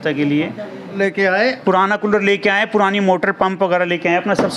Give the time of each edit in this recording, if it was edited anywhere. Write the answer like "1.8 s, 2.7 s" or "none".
1.0 s